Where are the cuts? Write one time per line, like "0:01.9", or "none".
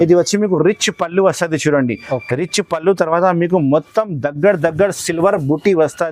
none